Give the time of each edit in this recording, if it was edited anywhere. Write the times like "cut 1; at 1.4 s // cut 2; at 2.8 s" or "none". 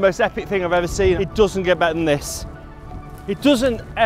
cut 1; at 1.2 s